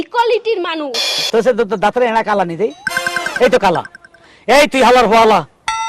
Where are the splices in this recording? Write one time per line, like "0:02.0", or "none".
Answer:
0:01.2

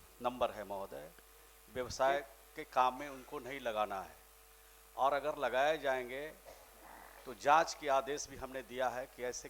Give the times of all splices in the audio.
none

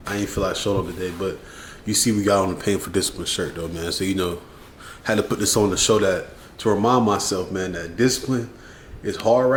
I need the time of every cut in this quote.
none

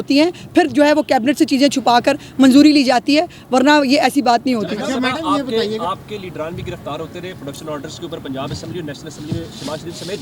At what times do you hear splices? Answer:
none

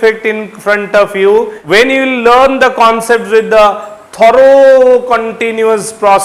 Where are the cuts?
0:01.6

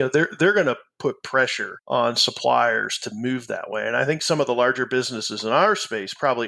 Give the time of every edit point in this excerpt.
0:04.2

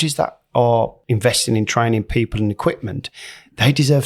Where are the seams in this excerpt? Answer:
0:01.0

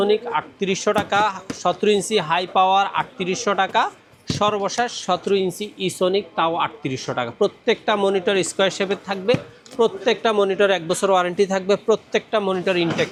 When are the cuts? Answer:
none

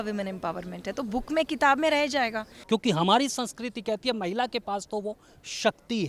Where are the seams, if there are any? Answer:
0:02.5

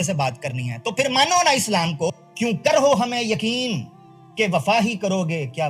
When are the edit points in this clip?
0:02.1

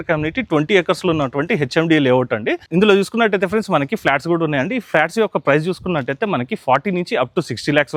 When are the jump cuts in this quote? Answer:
none

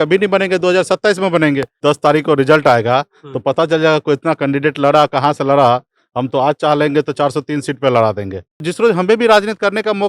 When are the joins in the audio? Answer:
0:01.8
0:08.7

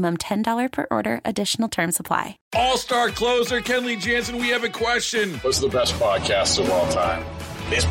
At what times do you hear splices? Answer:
0:02.4

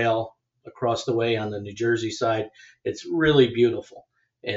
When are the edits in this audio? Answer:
none

